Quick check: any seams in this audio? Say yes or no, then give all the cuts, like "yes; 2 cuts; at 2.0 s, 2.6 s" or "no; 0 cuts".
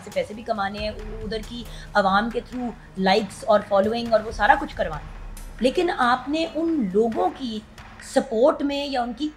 no; 0 cuts